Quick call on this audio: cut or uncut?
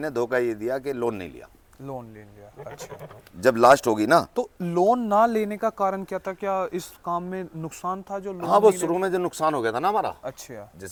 uncut